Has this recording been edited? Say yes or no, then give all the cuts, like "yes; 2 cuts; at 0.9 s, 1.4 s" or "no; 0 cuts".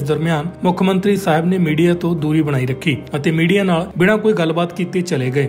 no; 0 cuts